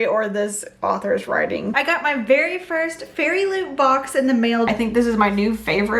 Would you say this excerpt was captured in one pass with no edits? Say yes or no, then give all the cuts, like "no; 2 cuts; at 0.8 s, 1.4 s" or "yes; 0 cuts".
no; 2 cuts; at 1.7 s, 4.7 s